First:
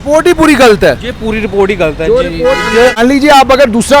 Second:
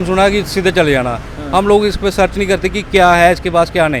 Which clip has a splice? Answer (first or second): first